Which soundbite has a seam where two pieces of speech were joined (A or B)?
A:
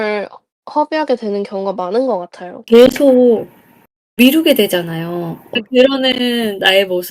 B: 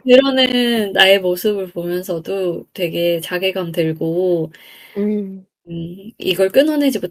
A